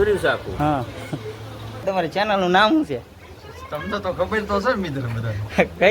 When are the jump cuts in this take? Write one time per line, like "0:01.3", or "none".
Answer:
0:01.8